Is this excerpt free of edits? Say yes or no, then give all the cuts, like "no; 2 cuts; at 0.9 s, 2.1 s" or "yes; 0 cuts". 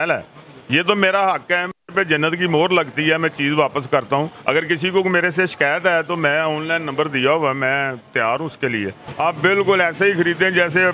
no; 1 cut; at 9.1 s